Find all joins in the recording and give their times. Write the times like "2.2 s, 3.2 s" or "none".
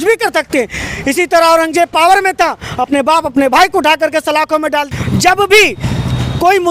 4.9 s